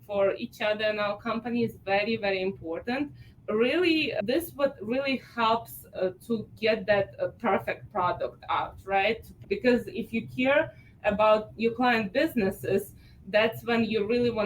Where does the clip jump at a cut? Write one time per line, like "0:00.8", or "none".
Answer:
0:03.3
0:04.2
0:09.3